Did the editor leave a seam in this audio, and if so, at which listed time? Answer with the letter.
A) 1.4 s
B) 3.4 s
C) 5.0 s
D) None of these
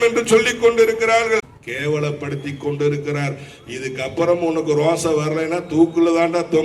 A